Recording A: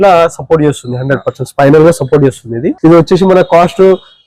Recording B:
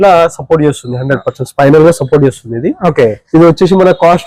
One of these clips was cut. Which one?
A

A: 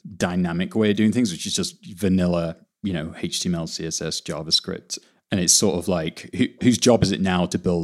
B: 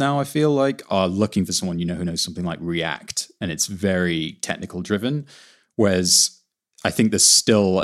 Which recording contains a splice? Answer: A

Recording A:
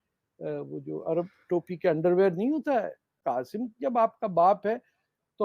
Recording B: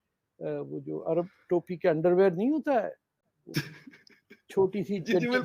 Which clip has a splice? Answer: A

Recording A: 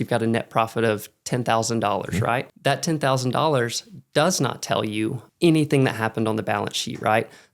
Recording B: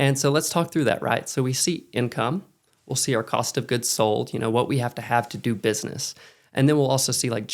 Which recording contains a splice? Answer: A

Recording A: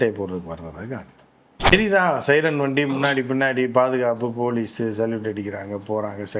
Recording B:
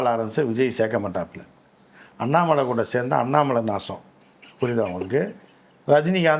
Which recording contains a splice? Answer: A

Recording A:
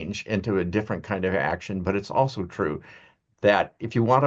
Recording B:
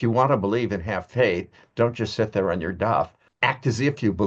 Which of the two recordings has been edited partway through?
B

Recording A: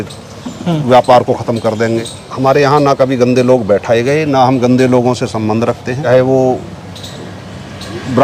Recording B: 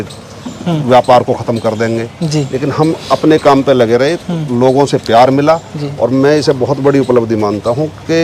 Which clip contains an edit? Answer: A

